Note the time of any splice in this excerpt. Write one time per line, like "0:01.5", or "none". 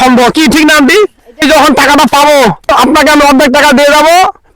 0:01.4
0:02.7